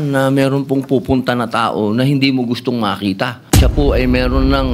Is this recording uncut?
no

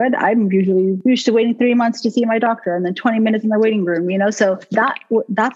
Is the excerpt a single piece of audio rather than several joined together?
no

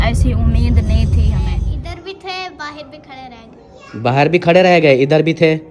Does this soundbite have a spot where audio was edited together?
yes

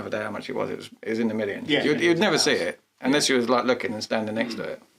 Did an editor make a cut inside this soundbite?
yes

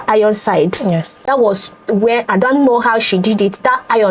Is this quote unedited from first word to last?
no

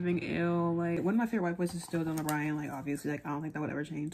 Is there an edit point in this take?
yes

